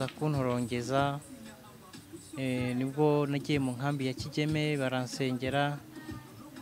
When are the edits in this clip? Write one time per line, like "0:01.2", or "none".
none